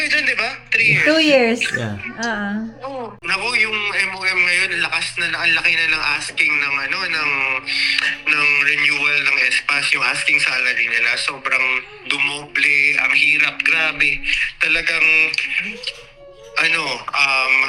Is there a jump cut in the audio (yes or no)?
yes